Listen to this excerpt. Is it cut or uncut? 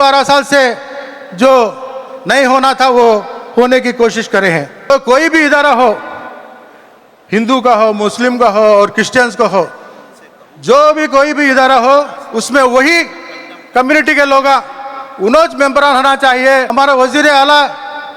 cut